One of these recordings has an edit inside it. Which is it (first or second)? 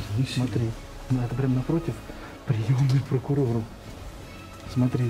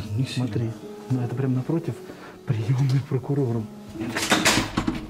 second